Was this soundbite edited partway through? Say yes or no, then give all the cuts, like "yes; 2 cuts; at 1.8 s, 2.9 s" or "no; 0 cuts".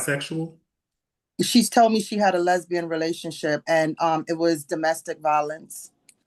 no; 0 cuts